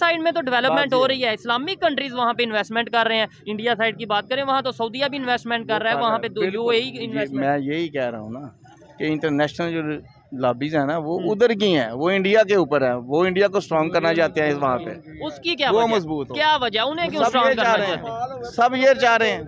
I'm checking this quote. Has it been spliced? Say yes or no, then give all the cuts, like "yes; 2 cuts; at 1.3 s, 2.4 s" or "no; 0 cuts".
no; 0 cuts